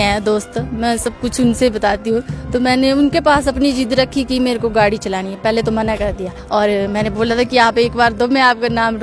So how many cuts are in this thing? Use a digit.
1